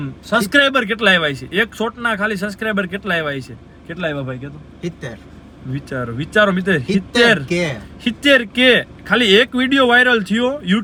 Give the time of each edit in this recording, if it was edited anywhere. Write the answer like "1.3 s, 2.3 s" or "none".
none